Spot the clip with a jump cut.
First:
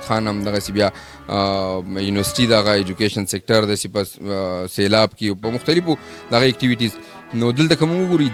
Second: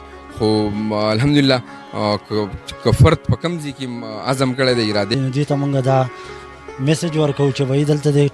second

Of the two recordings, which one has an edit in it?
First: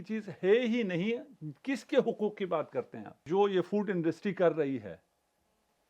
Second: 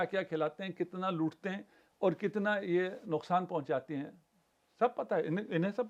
first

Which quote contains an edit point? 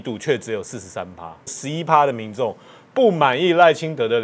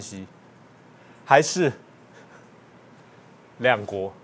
first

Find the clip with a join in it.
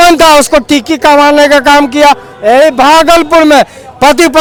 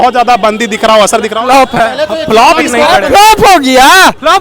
second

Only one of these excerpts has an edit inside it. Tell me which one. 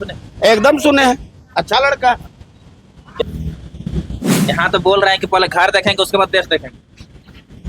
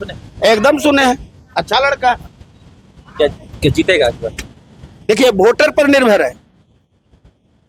first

